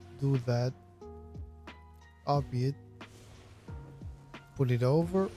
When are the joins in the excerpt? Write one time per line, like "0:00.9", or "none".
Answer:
0:00.8
0:02.1